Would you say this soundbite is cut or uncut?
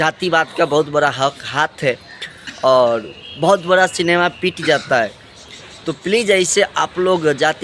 uncut